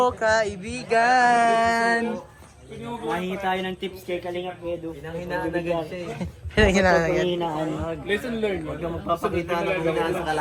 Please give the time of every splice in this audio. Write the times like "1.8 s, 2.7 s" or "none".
none